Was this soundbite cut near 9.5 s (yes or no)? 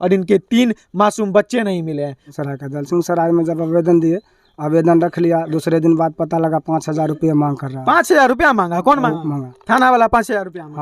yes